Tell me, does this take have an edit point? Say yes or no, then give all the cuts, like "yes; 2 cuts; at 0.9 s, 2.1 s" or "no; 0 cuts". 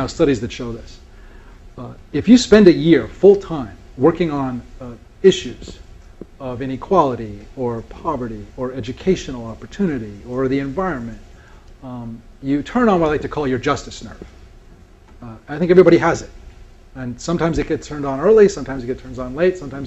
yes; 1 cut; at 13.4 s